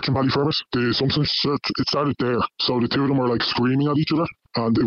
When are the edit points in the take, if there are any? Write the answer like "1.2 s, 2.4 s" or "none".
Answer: 1.1 s